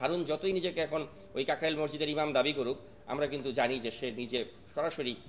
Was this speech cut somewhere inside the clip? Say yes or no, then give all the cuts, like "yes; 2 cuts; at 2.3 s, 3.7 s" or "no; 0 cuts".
no; 0 cuts